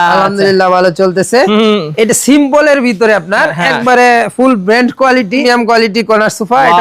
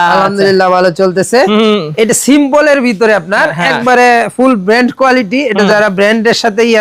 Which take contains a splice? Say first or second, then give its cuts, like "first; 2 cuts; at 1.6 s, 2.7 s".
first; 1 cut; at 5.4 s